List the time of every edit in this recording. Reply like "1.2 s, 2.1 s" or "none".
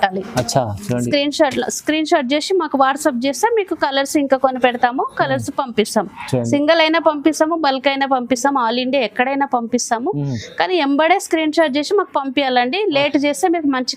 none